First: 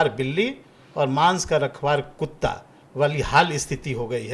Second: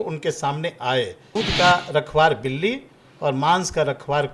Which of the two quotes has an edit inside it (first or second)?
second